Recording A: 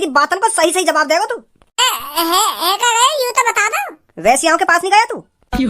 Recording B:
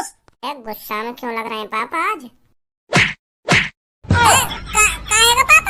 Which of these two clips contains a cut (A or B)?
A